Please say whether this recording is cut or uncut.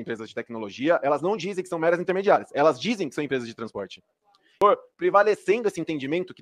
cut